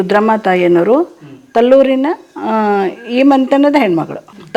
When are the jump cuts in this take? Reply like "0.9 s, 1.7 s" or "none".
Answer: none